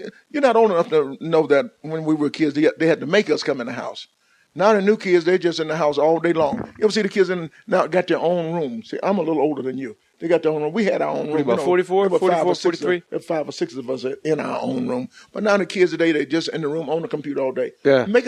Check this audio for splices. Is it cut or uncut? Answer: cut